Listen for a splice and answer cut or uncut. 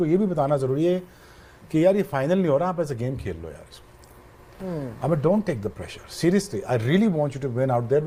uncut